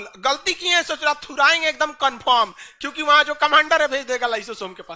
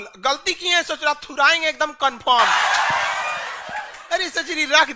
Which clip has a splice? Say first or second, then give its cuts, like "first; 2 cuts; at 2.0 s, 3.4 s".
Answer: second; 1 cut; at 2.5 s